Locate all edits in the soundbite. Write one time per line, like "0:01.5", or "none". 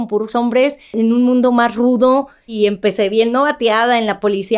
0:00.9
0:02.5